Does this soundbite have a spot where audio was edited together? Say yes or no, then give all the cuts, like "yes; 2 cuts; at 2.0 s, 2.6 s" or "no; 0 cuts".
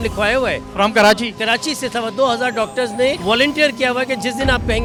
no; 0 cuts